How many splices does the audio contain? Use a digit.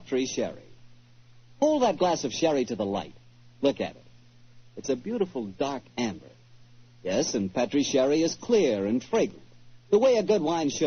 1